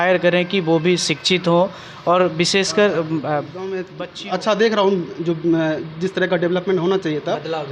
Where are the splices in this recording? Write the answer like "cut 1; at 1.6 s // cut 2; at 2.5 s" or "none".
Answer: cut 1; at 4.0 s